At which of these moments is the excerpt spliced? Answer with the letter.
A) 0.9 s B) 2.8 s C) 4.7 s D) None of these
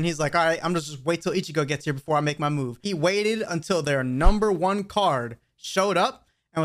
B